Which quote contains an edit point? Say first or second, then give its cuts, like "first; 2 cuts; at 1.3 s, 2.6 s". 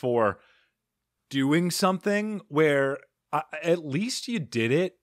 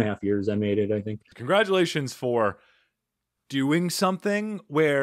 second; 1 cut; at 1.3 s